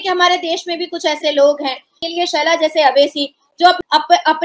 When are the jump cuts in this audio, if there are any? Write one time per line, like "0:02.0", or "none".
0:02.0
0:03.6